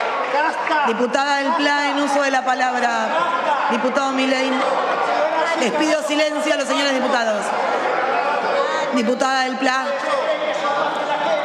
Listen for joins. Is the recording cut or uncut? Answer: uncut